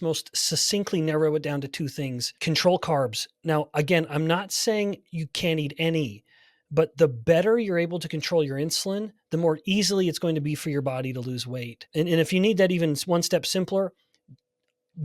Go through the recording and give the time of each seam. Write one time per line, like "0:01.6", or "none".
0:02.2
0:11.8